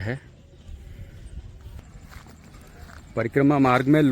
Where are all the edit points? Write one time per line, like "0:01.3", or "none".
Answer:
0:01.9